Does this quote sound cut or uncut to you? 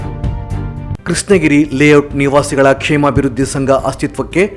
cut